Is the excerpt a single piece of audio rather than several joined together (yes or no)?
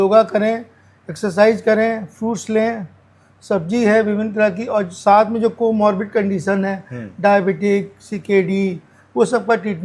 yes